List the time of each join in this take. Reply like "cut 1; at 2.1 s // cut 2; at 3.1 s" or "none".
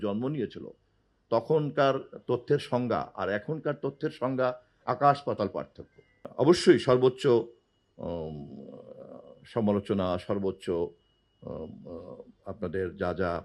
cut 1; at 6.2 s